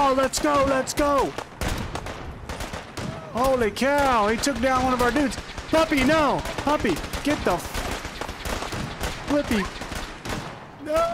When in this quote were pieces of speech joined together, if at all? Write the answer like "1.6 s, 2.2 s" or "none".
none